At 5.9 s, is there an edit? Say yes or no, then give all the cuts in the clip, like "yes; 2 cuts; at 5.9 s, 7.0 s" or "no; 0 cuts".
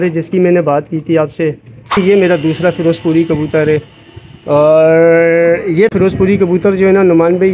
yes; 2 cuts; at 2.0 s, 5.9 s